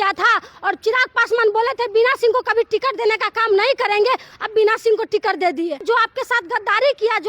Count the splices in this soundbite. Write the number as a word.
two